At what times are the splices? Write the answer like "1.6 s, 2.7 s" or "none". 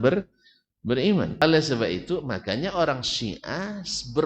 1.4 s